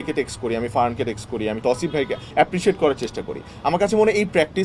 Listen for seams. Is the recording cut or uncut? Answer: cut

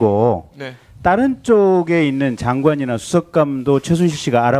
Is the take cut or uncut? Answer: uncut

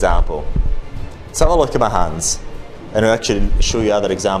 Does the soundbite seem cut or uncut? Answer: uncut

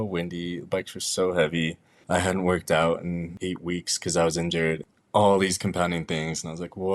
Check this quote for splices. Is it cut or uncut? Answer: cut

